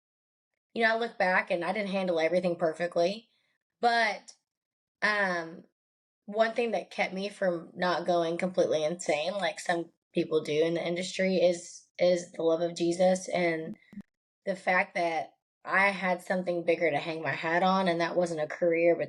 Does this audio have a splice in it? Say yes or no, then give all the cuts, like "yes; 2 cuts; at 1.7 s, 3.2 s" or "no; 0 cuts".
no; 0 cuts